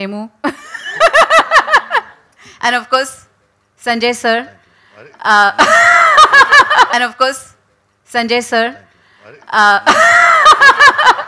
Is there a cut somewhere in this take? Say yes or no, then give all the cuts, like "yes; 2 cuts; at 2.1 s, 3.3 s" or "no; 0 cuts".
yes; 1 cut; at 6.9 s